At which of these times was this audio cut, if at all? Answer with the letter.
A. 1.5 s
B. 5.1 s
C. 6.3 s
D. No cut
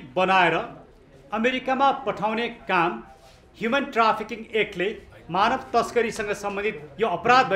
D